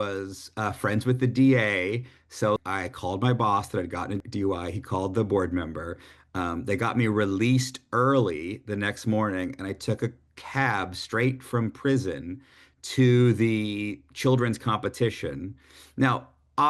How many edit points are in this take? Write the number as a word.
two